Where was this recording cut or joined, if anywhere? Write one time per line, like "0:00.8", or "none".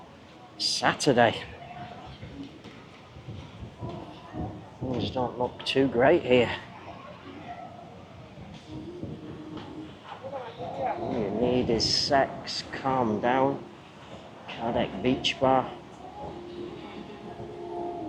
none